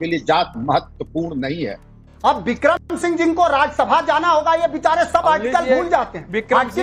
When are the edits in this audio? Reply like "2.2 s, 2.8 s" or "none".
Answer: 2.1 s